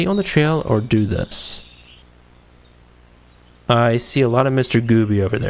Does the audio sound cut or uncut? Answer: cut